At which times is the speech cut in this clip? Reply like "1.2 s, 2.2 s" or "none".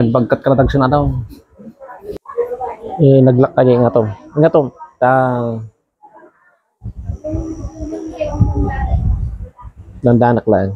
1.9 s